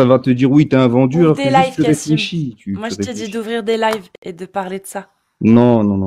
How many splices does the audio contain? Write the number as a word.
zero